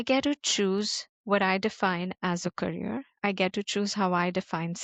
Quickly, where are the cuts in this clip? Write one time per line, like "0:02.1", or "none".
none